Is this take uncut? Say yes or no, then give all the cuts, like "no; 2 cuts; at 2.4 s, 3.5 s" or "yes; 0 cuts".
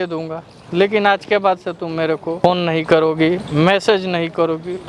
no; 1 cut; at 2.4 s